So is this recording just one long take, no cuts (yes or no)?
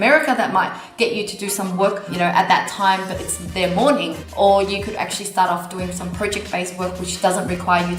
no